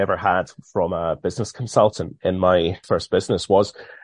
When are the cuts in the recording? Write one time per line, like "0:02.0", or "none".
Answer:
0:02.8